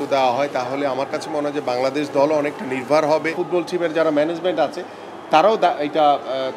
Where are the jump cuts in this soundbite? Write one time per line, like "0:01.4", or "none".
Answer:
0:03.4